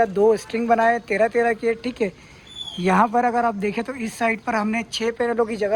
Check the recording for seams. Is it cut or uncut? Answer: uncut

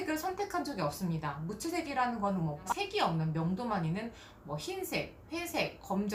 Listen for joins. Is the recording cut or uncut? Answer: uncut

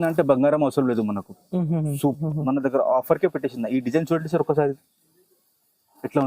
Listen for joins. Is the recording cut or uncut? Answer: cut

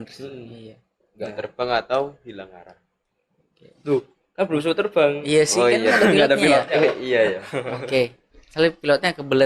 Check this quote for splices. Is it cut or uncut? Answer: uncut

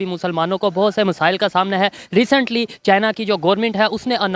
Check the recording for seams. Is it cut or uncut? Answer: uncut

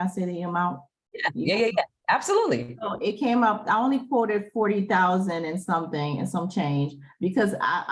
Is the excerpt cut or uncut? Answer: uncut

